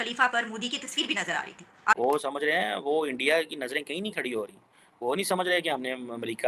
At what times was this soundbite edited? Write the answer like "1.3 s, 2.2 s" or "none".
2.0 s